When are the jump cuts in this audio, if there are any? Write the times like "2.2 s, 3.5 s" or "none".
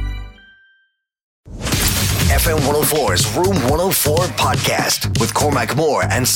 1.5 s

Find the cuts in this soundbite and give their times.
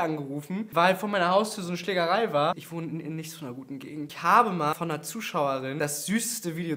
4.1 s, 4.7 s, 5.7 s

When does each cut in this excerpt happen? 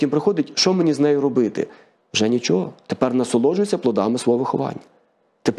none

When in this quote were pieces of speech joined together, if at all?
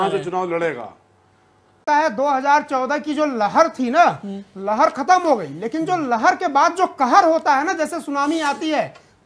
1.8 s

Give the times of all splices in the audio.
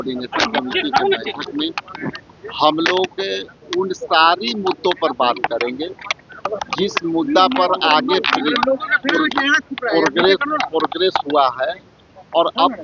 none

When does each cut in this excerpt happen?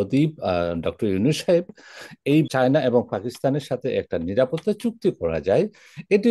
2.5 s

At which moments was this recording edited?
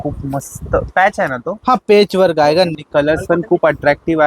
2.8 s

